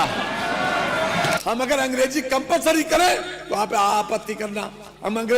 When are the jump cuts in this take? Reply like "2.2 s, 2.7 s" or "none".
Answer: 1.4 s